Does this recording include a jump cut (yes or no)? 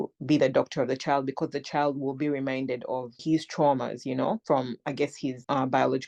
no